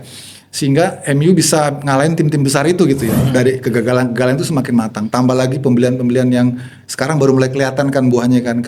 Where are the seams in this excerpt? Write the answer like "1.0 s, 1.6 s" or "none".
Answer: 3.2 s